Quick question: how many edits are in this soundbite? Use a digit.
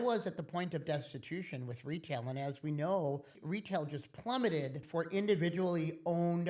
2